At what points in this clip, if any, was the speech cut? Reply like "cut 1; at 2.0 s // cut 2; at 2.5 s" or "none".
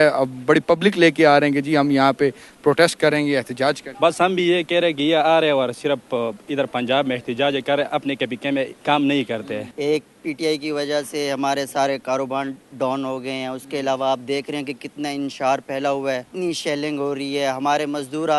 cut 1; at 3.9 s // cut 2; at 8.7 s // cut 3; at 9.6 s // cut 4; at 16.3 s